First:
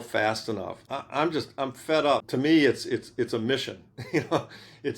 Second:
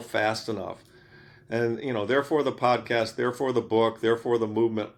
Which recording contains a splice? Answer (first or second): first